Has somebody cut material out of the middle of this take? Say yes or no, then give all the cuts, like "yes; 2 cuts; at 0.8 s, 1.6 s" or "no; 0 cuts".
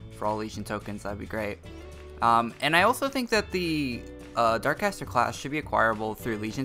yes; 1 cut; at 5.2 s